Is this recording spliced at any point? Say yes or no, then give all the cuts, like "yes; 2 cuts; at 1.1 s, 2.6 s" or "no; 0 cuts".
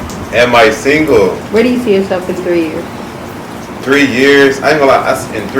yes; 1 cut; at 1.4 s